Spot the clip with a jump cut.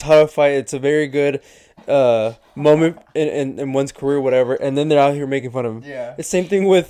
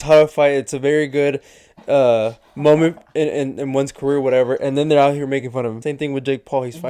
second; 1 cut; at 5.8 s

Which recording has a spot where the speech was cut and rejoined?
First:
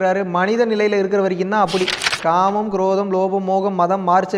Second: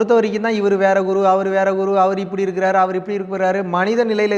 first; 1 cut; at 2.1 s

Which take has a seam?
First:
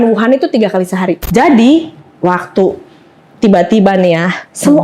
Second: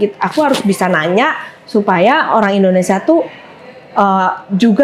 first; 1 cut; at 1.2 s

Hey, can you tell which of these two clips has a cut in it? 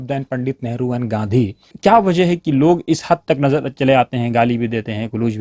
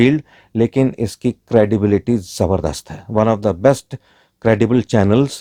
first; 1 cut; at 1.7 s

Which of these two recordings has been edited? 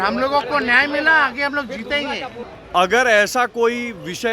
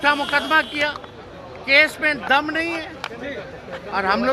first; 1 cut; at 2.5 s

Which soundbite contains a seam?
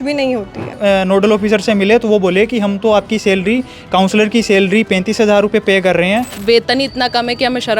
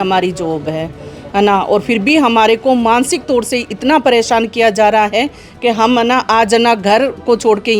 first; 2 cuts; at 0.8 s, 6.4 s

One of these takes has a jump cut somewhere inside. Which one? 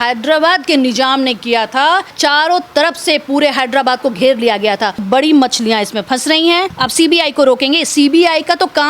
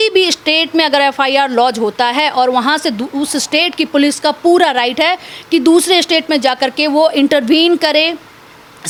first; 3 cuts; at 2.1 s, 5.0 s, 6.8 s

